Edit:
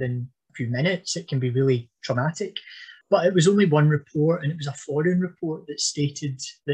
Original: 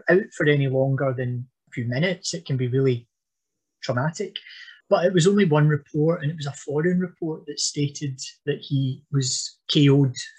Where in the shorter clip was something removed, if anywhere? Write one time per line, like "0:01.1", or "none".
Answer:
0:01.9